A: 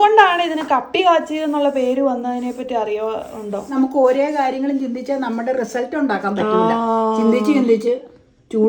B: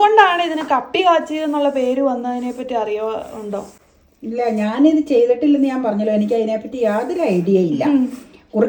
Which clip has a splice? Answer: A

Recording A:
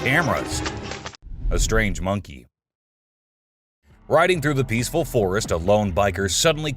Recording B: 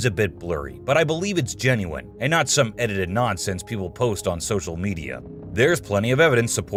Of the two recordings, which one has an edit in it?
A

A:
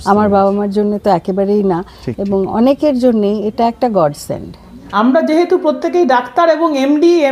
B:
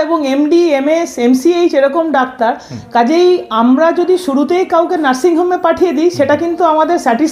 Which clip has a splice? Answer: A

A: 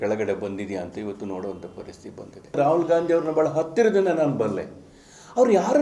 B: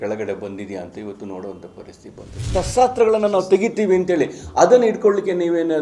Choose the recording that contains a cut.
B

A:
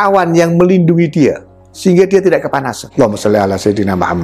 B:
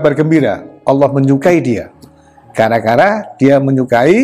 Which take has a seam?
A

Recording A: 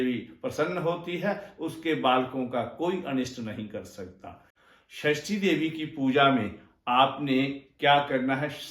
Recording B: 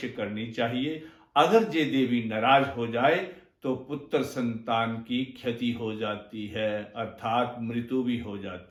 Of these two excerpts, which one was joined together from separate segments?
A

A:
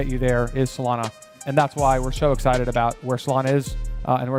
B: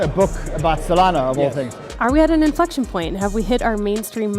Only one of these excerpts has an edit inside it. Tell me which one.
B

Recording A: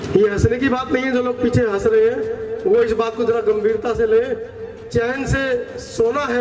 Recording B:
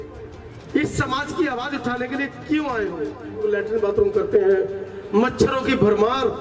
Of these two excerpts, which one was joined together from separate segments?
B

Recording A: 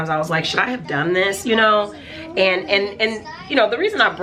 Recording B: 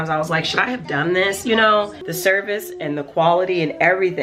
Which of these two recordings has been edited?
B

